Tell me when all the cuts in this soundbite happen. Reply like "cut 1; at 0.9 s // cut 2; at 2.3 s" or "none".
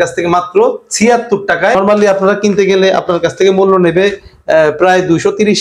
cut 1; at 1.7 s